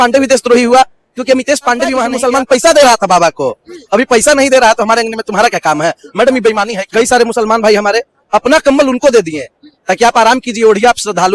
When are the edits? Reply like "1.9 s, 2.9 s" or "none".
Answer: 2.1 s, 6.8 s

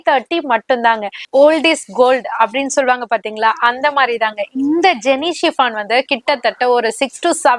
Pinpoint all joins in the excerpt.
1.1 s

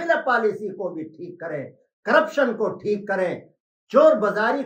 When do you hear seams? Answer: none

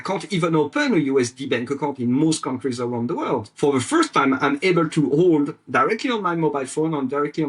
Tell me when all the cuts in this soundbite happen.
3.5 s

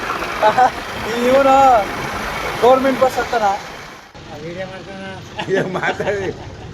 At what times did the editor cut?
4.0 s

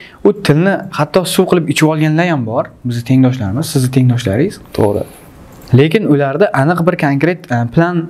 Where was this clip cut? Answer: none

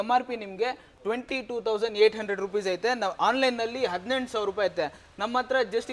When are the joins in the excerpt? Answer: none

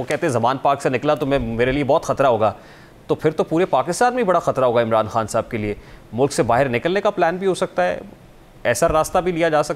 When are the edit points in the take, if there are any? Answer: none

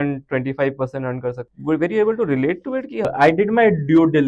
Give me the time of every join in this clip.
1.5 s, 3.1 s

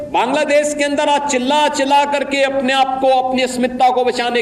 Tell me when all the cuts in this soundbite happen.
none

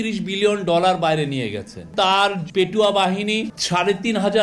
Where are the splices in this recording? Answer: 1.9 s, 3.5 s

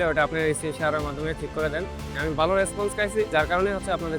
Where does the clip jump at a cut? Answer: 2.1 s, 3.3 s

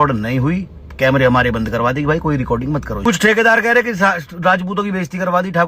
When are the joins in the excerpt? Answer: 3.0 s

